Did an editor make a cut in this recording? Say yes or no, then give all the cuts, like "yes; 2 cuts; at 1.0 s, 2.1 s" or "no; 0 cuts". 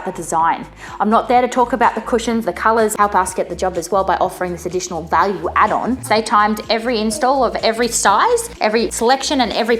yes; 3 cuts; at 2.9 s, 6.0 s, 8.8 s